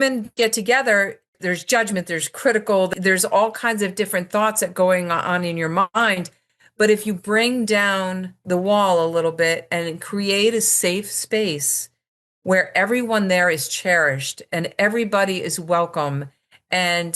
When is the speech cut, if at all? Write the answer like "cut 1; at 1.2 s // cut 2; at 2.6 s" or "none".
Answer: cut 1; at 1.4 s // cut 2; at 2.9 s